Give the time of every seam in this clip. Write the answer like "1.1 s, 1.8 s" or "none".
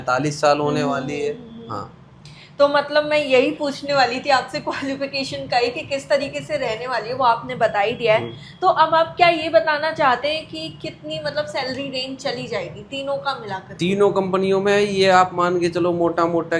none